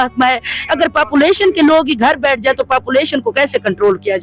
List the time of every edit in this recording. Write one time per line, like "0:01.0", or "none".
none